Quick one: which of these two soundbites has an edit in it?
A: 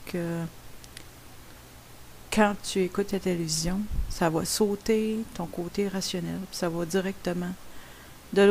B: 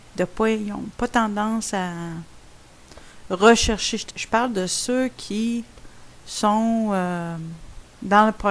A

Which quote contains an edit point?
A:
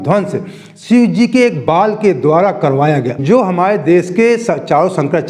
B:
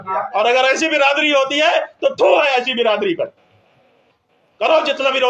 A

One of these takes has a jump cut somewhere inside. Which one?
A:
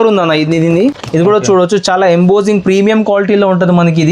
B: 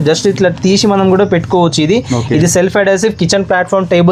A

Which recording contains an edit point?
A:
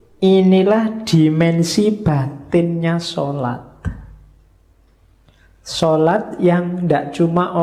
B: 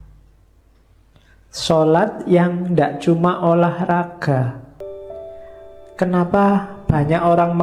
B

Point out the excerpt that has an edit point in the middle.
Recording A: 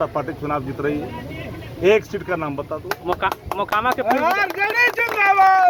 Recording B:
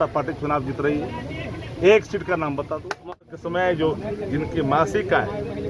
B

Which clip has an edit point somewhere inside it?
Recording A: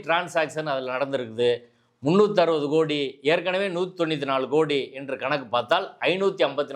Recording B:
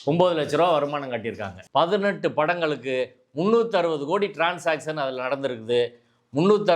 B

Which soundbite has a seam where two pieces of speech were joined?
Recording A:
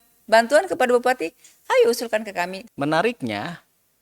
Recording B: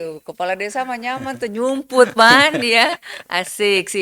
A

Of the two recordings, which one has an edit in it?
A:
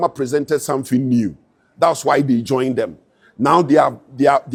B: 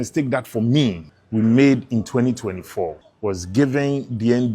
B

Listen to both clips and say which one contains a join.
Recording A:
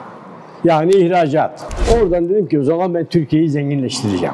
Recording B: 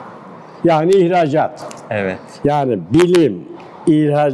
A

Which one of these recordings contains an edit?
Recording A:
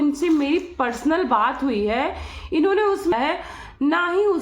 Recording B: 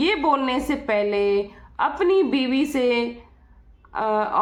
A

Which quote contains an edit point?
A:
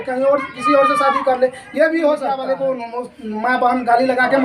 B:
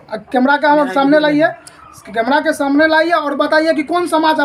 A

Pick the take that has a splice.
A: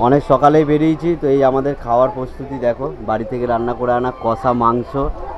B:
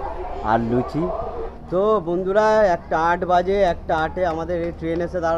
B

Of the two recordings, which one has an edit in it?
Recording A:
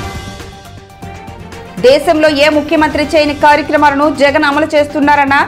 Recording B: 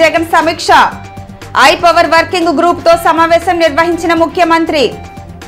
A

